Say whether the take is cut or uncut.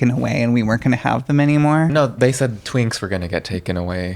cut